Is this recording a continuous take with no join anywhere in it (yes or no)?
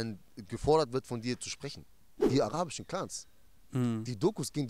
no